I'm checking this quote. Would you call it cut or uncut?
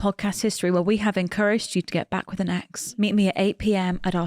cut